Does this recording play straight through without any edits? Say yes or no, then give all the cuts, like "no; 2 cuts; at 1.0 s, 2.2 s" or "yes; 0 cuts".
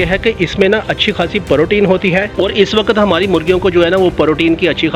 yes; 0 cuts